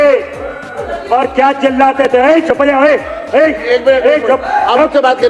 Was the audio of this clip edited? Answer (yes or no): no